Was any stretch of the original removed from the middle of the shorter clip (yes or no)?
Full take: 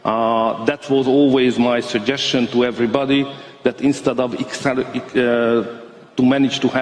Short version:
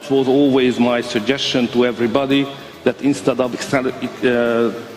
yes